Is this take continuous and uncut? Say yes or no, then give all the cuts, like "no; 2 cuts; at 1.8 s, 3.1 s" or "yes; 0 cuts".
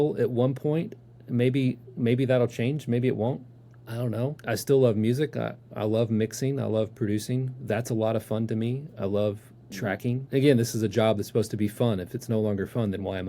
no; 2 cuts; at 4.4 s, 10.2 s